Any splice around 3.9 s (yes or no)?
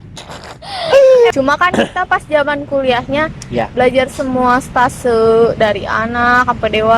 no